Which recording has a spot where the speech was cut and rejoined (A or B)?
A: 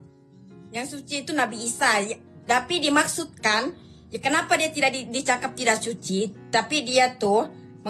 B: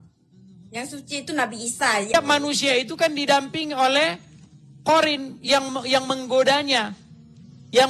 B